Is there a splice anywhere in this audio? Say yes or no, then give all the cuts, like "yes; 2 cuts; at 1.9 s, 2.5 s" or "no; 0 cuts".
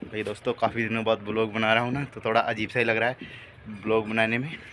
no; 0 cuts